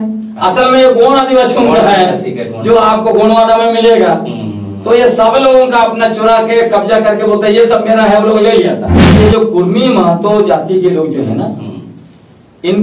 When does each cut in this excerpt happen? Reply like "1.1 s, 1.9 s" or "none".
9.2 s